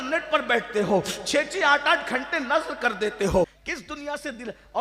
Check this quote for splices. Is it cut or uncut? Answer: cut